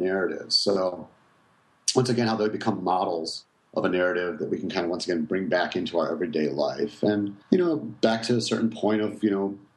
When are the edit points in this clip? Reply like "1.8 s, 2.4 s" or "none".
7.4 s